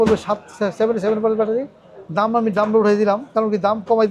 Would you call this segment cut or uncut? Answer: uncut